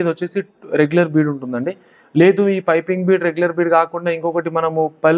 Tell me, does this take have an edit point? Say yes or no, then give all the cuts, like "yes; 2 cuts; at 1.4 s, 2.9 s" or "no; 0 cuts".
no; 0 cuts